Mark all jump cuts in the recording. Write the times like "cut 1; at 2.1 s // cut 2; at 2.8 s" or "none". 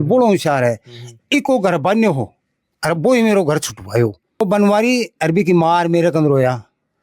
cut 1; at 4.4 s